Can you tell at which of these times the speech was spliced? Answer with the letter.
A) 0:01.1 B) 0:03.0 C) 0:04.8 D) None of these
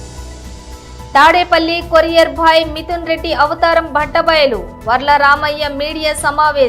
A